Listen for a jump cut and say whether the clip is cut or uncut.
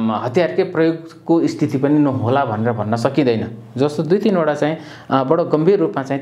uncut